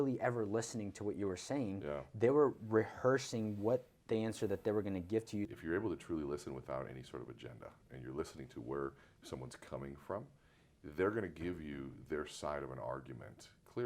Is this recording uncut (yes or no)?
no